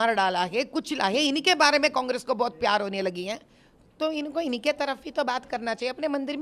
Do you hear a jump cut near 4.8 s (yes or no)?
no